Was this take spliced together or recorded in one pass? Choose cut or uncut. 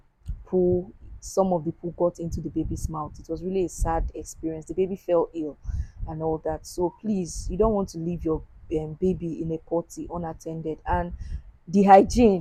uncut